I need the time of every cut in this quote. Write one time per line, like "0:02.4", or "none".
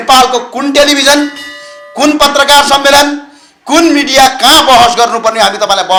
none